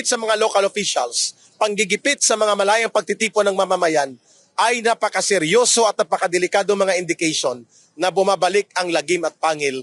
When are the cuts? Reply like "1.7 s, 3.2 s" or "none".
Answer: none